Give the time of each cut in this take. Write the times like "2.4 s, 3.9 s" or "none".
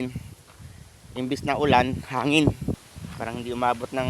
2.7 s